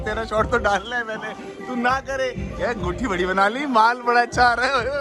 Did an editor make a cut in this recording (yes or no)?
no